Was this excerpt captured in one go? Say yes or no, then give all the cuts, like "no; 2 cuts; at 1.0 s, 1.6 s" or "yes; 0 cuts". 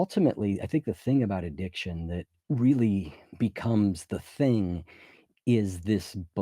no; 2 cuts; at 2.3 s, 3.2 s